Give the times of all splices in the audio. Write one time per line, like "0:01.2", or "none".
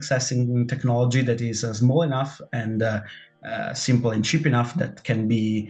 none